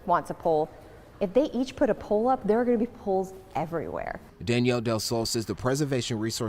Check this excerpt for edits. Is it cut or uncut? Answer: uncut